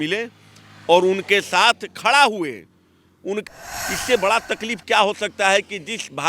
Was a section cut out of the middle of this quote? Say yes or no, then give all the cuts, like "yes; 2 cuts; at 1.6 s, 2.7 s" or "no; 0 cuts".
yes; 1 cut; at 3.4 s